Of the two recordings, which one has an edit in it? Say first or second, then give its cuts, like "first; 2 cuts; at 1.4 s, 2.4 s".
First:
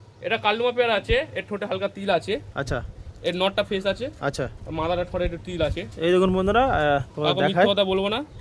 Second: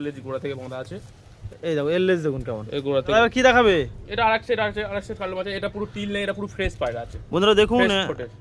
second; 1 cut; at 3.1 s